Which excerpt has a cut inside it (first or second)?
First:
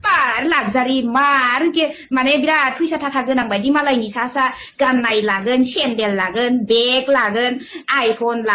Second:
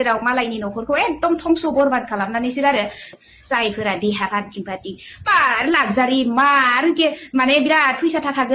second